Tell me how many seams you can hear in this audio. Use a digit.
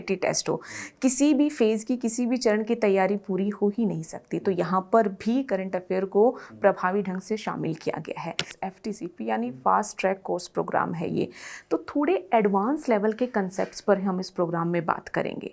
1